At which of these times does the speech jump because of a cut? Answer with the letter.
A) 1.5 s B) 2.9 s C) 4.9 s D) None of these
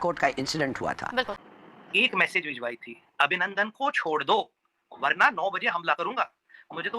A